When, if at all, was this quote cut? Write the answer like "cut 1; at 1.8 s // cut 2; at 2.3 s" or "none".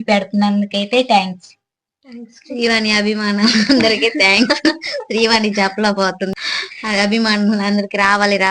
cut 1; at 6.3 s